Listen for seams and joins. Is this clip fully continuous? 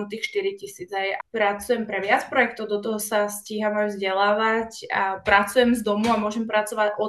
no; 1 cut; at 1.1 s

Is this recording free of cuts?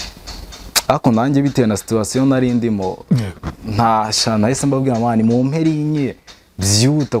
yes; 0 cuts

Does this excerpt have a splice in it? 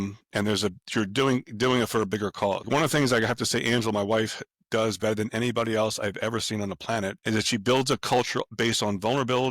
yes; 3 cuts; at 2.6 s, 7.2 s, 8.4 s

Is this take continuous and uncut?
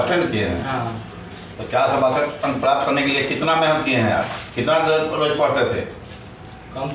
yes; 0 cuts

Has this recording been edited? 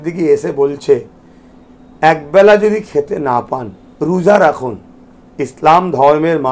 no; 0 cuts

